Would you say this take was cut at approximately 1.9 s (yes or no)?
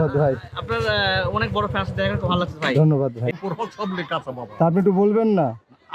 yes